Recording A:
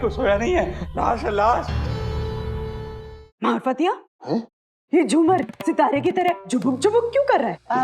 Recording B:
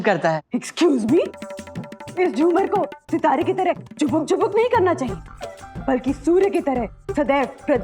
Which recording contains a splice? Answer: A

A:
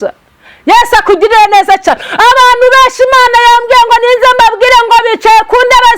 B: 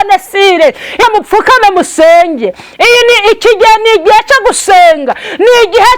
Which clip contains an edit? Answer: B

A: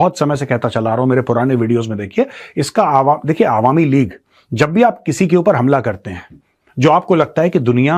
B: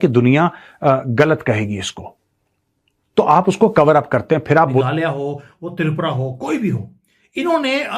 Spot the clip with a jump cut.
B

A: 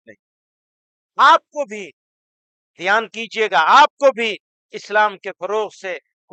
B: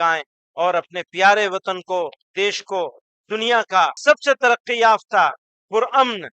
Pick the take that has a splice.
B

